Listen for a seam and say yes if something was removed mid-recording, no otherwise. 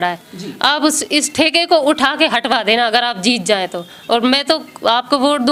no